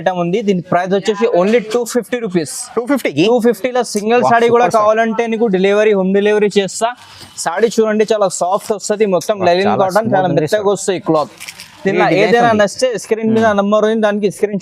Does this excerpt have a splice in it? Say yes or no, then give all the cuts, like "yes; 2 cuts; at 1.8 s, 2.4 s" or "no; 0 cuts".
no; 0 cuts